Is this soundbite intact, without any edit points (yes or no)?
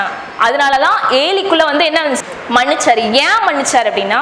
no